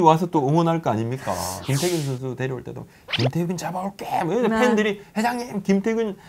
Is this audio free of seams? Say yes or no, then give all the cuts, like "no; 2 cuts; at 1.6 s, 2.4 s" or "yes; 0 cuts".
no; 1 cut; at 1.6 s